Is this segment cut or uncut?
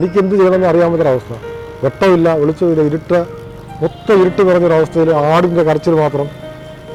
uncut